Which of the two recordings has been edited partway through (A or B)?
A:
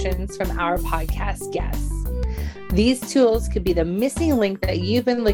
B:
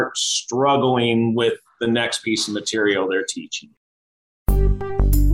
B